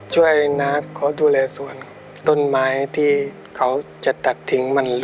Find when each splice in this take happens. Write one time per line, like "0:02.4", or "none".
0:00.8
0:02.0
0:03.4